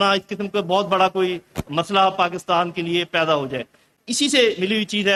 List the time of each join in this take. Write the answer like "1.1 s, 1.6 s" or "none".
none